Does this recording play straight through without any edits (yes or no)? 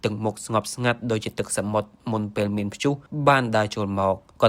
no